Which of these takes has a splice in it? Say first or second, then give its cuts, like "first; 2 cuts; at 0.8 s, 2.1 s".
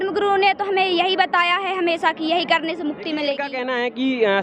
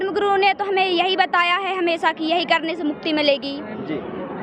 first; 1 cut; at 3.5 s